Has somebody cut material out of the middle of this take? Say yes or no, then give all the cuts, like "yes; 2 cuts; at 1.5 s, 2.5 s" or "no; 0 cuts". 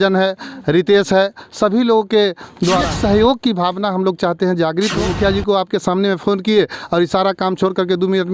yes; 2 cuts; at 2.9 s, 5.0 s